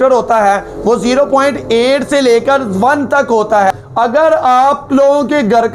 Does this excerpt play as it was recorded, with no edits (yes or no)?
no